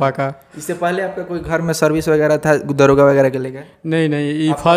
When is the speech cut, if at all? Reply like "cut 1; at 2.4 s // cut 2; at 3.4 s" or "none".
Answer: none